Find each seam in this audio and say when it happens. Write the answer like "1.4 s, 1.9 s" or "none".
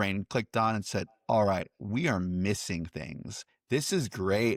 none